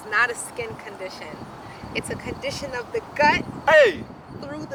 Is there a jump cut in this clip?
no; 0 cuts

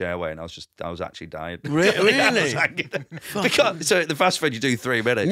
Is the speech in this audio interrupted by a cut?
no; 0 cuts

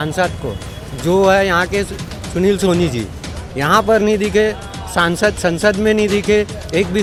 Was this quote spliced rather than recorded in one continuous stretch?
no; 0 cuts

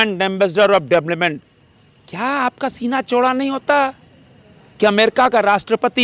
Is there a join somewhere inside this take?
no; 0 cuts

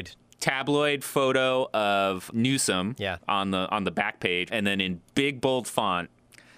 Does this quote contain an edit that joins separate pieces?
yes; 2 cuts; at 2.3 s, 4.5 s

